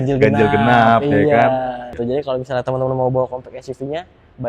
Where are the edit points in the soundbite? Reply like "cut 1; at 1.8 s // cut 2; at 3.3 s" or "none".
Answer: cut 1; at 2.0 s